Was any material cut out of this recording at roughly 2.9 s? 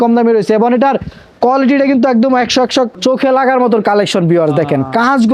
yes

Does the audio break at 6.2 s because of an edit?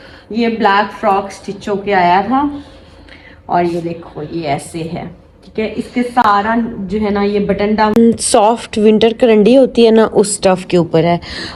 no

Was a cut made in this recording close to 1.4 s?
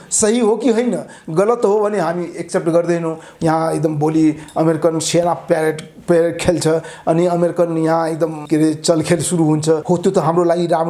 no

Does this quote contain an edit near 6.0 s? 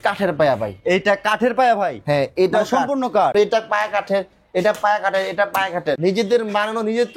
yes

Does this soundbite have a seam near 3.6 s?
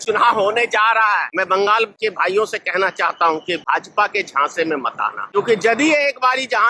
yes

